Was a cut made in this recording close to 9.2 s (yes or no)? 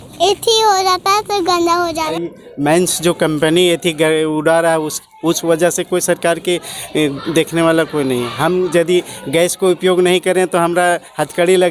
no